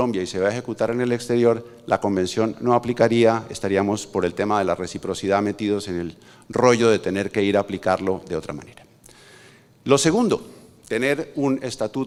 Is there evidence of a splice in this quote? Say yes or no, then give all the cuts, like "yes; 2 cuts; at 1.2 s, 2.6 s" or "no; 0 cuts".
no; 0 cuts